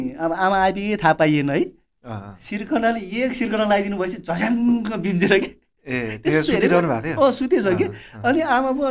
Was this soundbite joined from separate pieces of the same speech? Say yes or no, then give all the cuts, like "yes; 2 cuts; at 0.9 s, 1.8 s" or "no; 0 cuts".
no; 0 cuts